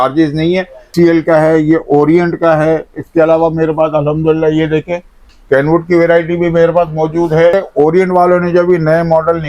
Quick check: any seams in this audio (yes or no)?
yes